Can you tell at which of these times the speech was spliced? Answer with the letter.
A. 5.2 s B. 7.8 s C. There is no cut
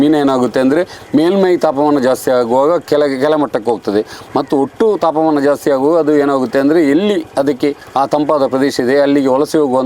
B